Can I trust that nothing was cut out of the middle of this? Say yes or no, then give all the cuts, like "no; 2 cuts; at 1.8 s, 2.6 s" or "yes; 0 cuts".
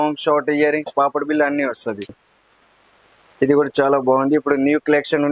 no; 1 cut; at 2.2 s